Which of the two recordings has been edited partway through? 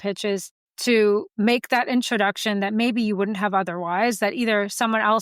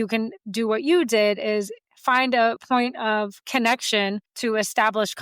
second; 1 cut; at 4.3 s

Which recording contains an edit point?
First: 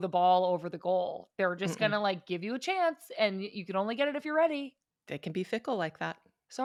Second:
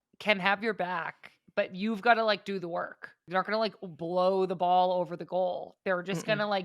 second; 1 cut; at 3.2 s

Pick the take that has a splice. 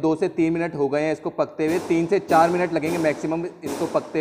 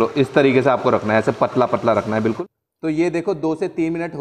second; 1 cut; at 2.2 s

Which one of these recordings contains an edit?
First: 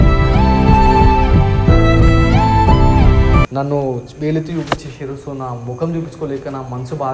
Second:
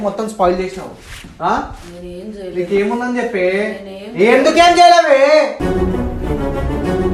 first; 1 cut; at 3.5 s

